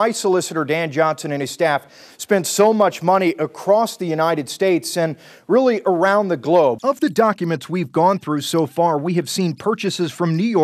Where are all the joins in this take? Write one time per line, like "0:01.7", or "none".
0:06.8